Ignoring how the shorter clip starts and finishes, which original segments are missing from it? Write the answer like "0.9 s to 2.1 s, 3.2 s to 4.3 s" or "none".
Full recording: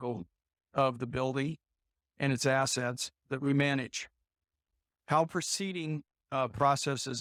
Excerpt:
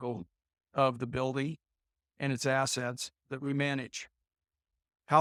none